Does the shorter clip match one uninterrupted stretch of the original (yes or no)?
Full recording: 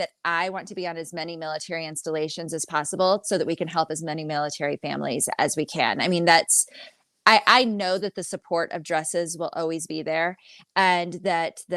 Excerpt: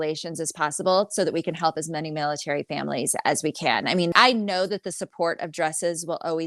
no